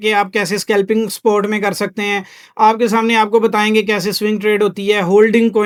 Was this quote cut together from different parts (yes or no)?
no